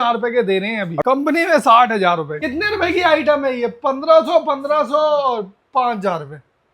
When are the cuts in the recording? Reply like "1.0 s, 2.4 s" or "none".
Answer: 1.0 s, 2.4 s